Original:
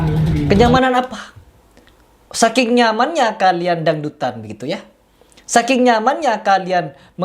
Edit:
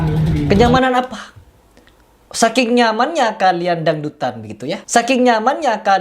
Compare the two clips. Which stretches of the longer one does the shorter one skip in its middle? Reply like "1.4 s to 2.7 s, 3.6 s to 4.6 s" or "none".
4.8 s to 5.4 s